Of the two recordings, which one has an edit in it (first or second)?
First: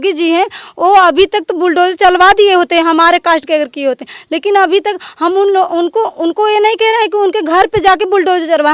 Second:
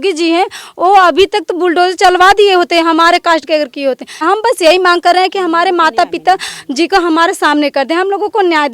second